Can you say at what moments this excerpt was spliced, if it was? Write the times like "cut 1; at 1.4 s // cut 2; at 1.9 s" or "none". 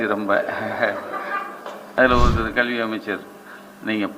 cut 1; at 1.8 s